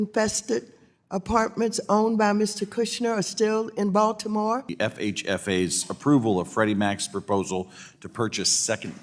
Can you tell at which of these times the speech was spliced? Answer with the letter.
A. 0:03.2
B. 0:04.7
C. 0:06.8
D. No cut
B